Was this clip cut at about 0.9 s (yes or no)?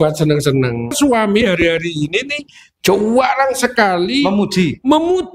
yes